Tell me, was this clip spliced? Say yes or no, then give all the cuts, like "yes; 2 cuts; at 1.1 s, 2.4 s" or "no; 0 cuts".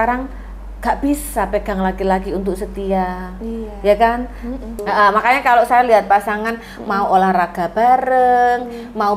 yes; 1 cut; at 4.8 s